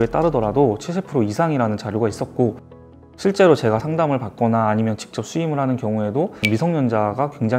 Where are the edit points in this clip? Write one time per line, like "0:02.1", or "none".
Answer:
none